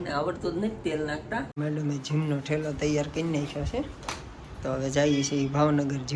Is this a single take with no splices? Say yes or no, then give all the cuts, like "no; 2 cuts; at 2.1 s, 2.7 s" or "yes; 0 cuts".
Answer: no; 1 cut; at 1.6 s